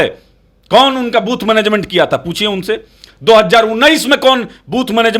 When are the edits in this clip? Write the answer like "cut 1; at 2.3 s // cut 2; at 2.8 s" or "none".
none